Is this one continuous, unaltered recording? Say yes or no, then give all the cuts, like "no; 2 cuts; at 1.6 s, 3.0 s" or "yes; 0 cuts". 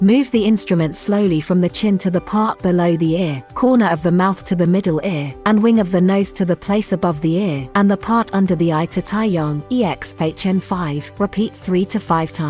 no; 5 cuts; at 3.4 s, 5.3 s, 7.6 s, 9.6 s, 11.0 s